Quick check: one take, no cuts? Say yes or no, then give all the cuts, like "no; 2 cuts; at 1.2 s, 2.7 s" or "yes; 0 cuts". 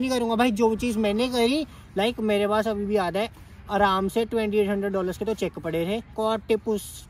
no; 2 cuts; at 1.8 s, 6.1 s